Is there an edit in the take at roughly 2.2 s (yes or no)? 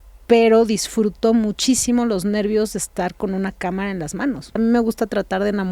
no